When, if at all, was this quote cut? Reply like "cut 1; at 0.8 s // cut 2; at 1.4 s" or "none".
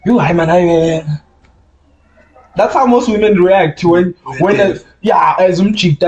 none